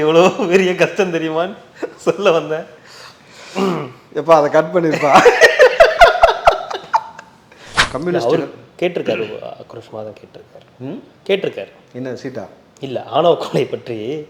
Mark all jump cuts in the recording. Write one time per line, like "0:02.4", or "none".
0:07.7